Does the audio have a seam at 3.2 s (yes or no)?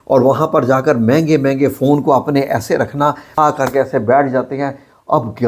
yes